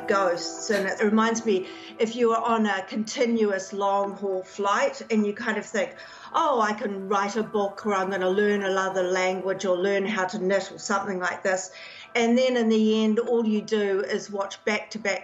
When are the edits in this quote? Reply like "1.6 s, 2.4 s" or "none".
1.0 s